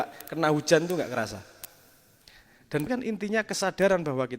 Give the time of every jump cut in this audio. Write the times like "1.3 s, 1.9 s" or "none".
2.9 s